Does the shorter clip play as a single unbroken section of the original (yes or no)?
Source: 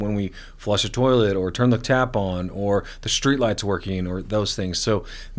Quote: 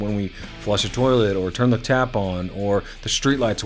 yes